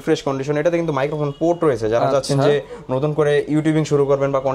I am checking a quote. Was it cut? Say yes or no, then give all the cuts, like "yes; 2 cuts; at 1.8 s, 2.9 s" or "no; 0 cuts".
no; 0 cuts